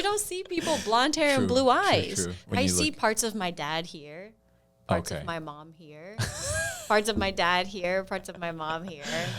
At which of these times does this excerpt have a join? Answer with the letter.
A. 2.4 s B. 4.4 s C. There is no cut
A